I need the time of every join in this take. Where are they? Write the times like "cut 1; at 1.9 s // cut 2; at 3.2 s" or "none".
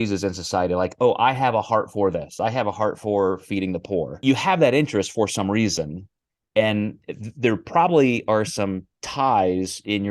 cut 1; at 2.3 s // cut 2; at 4.1 s